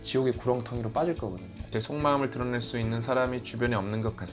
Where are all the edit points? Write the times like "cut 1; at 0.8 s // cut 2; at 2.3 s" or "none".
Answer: cut 1; at 1.7 s